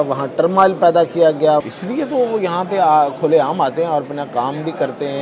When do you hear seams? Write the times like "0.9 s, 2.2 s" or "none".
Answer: 1.7 s